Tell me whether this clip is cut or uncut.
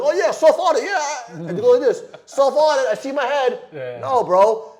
uncut